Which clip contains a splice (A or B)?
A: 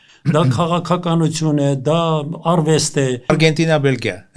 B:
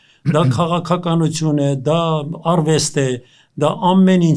A